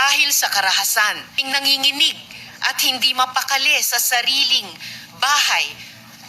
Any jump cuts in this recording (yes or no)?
yes